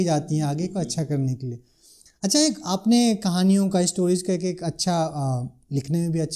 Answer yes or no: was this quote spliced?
no